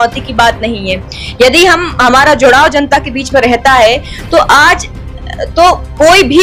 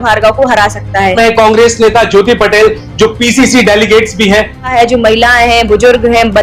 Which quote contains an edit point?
second; 2 cuts; at 1.1 s, 4.7 s

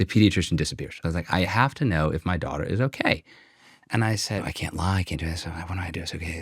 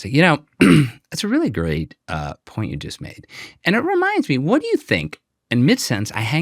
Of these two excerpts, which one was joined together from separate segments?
first; 2 cuts; at 1.0 s, 4.4 s

